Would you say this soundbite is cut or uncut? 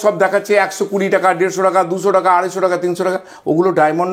uncut